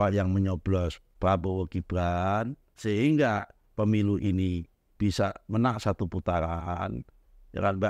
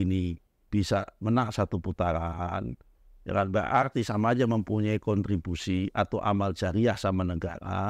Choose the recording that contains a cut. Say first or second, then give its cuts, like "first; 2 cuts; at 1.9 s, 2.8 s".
first; 2 cuts; at 1.0 s, 2.7 s